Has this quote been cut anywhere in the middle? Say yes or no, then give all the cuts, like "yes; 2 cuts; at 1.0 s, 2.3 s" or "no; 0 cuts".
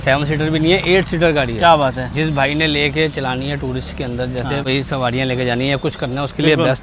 no; 0 cuts